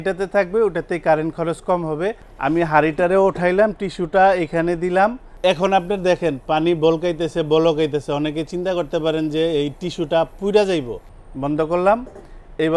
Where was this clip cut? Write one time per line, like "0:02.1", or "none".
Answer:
0:02.3
0:05.3
0:11.0